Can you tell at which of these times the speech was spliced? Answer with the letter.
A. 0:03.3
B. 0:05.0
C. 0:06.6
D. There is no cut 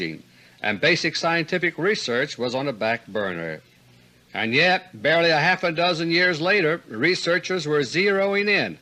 C